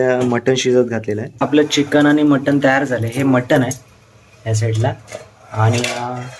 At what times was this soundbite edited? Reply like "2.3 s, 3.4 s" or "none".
1.5 s

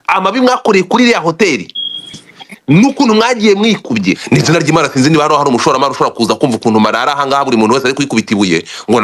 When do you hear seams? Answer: 4.2 s

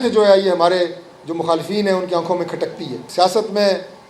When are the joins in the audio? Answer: 3.0 s

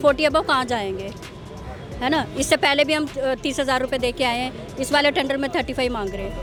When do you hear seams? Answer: none

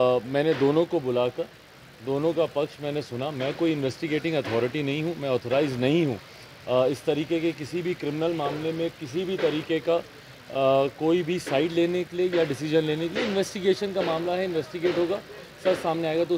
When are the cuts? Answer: 12.6 s, 13.9 s

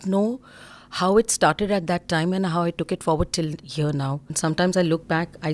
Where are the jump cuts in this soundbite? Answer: 4.3 s

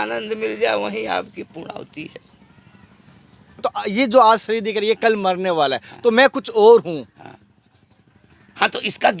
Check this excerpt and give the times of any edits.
3.4 s

